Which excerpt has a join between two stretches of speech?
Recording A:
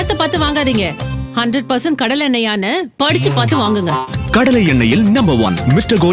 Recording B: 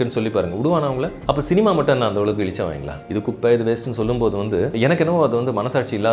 B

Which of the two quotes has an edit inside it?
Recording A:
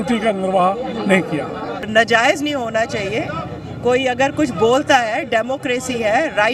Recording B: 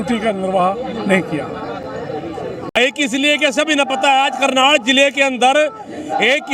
A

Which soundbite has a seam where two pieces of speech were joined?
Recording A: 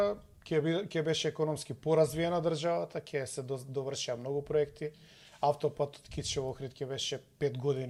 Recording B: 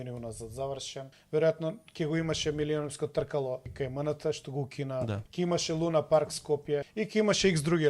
B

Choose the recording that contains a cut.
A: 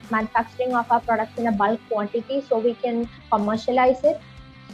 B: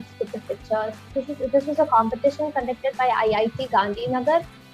B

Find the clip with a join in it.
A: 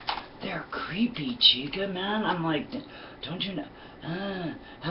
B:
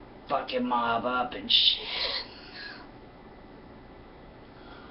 A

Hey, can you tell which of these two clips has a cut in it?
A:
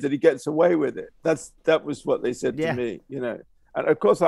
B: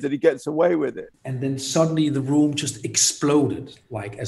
B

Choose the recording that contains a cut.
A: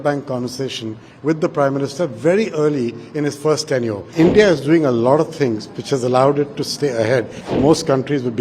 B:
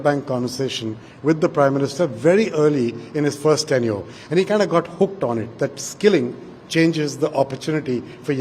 A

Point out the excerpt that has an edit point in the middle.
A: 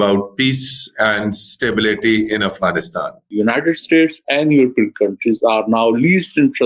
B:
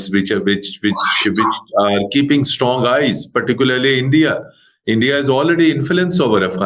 A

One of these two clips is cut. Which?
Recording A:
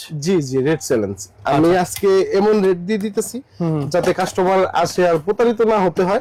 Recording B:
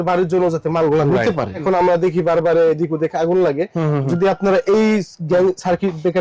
B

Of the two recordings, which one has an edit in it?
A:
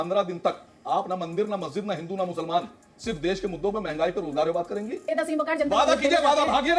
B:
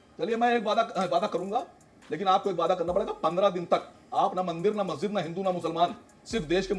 A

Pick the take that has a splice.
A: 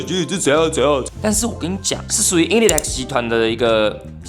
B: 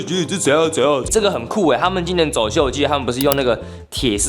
B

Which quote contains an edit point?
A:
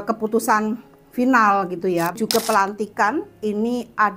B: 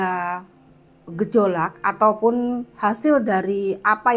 A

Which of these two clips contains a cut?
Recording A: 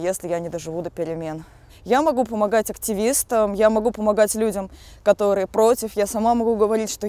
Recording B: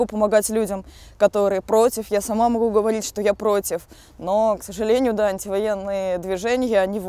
A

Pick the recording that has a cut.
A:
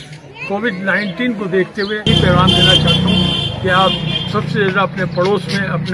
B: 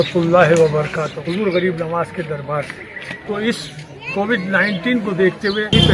B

